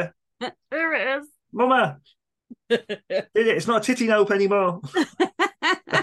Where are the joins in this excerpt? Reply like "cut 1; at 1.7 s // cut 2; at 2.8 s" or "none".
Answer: none